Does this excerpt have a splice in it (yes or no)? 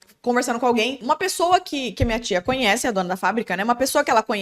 yes